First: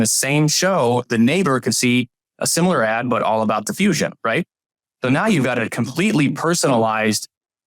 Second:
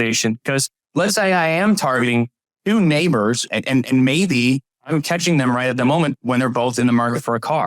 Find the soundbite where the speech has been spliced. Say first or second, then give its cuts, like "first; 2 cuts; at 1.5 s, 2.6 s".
second; 2 cuts; at 3.4 s, 4.7 s